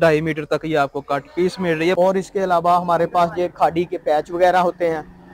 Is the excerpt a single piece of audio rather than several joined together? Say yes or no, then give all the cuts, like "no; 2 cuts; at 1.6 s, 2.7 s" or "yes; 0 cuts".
no; 1 cut; at 2.0 s